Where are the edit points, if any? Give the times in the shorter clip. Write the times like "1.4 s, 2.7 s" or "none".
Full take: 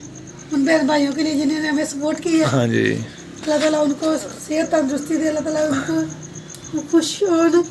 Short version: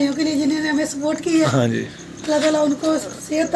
1.8 s